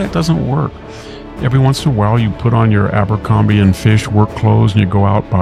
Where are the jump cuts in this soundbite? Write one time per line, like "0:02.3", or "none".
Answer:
none